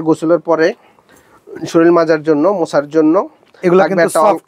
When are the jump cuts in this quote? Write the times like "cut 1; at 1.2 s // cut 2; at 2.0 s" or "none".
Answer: none